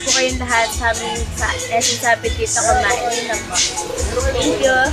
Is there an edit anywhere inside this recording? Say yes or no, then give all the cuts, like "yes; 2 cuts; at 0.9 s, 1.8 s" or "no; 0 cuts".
no; 0 cuts